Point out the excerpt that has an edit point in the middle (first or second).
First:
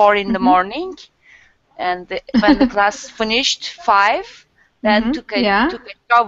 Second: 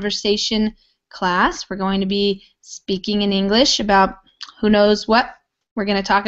first